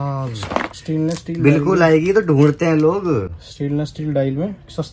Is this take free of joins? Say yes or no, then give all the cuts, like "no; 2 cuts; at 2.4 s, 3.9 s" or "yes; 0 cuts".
yes; 0 cuts